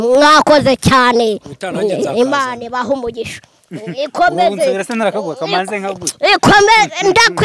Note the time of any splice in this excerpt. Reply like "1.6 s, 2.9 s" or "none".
none

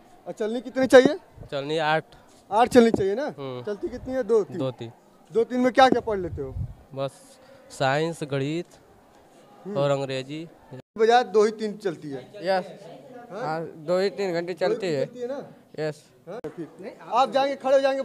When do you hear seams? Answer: 10.8 s, 16.5 s

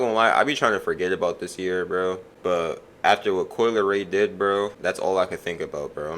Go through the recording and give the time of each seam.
2.3 s, 4.8 s

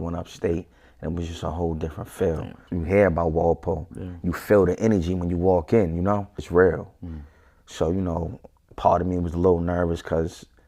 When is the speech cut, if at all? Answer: 2.6 s, 6.5 s

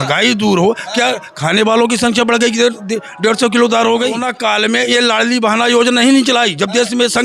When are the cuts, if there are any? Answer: 4.3 s

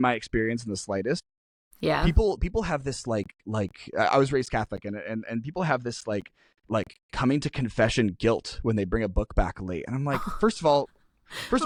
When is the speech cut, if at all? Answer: none

